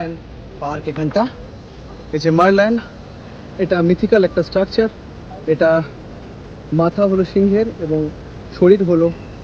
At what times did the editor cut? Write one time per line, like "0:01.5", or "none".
none